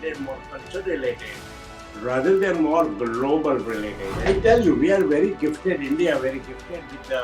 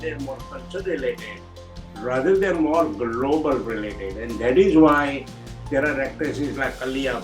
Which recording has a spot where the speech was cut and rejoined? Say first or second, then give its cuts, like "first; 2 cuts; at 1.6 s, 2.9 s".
first; 1 cut; at 4.1 s